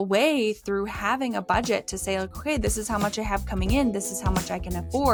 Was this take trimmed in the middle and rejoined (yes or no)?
no